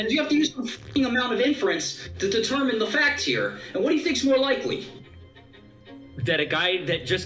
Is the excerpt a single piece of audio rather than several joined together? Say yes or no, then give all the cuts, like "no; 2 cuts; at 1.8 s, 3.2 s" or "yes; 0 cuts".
yes; 0 cuts